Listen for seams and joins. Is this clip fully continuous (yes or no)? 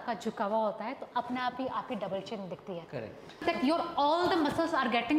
no